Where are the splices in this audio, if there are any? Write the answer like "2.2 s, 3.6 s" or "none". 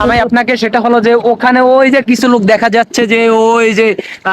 none